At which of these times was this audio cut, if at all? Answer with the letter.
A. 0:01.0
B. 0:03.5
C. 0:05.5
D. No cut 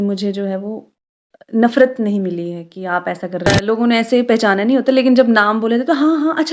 B